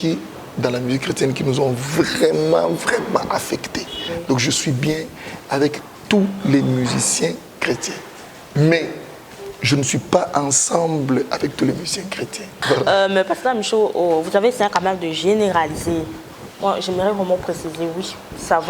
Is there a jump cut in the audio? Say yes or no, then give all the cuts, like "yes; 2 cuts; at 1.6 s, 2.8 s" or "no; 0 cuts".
yes; 2 cuts; at 4.0 s, 12.5 s